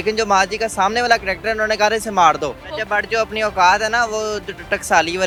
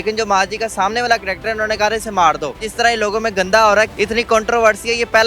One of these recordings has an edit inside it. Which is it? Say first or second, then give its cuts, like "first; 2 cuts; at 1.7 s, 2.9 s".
second; 2 cuts; at 2.7 s, 3.9 s